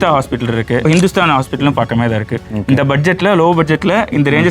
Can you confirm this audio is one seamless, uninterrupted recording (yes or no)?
no